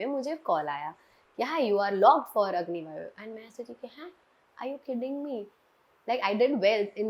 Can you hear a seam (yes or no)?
no